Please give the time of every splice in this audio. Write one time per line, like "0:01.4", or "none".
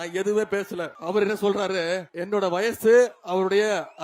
0:00.9
0:02.1

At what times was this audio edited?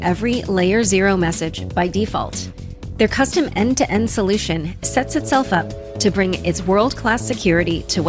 none

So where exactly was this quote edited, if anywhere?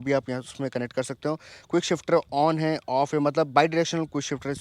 none

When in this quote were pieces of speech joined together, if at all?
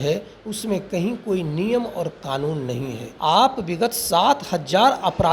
0:03.1

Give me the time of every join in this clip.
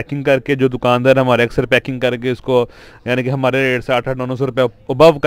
none

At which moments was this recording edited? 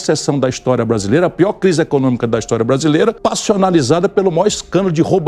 0:03.2

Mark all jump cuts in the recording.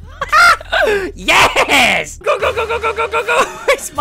0:02.2

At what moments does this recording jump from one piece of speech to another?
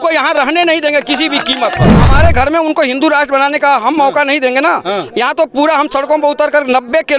0:02.1

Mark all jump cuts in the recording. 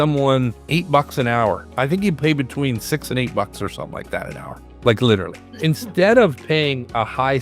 none

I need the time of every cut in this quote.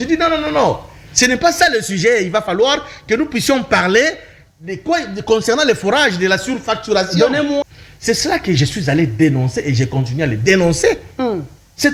0:07.6

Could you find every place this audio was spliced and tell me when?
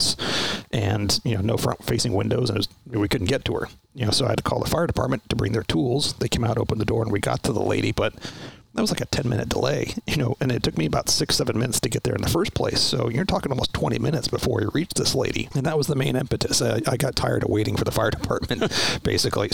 0:15.5

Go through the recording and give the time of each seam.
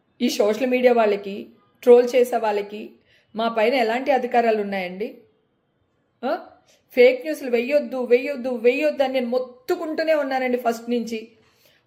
none

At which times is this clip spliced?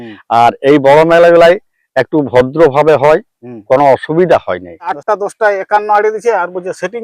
0:05.0

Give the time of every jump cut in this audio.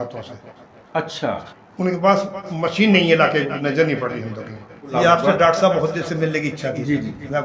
0:04.9

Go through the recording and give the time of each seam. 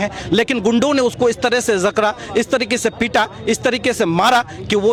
none

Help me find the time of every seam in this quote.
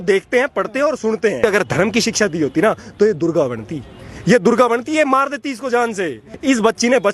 0:01.4
0:06.3

